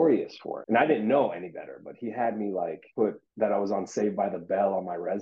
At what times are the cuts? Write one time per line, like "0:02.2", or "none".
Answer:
0:03.0